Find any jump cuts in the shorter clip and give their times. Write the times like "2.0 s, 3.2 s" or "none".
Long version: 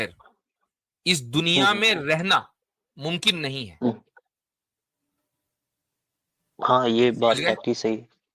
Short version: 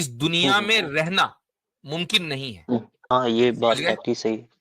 3.1 s